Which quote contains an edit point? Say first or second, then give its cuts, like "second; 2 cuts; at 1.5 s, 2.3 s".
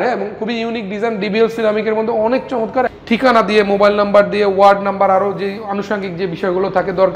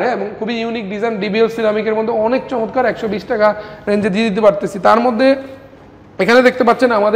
first; 1 cut; at 2.9 s